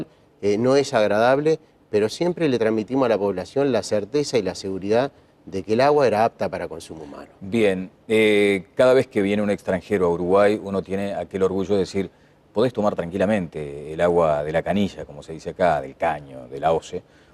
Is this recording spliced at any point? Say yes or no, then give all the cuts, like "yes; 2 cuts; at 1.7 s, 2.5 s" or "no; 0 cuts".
no; 0 cuts